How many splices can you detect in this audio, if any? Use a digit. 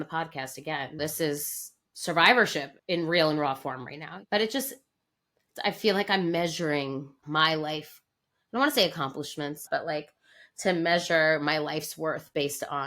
1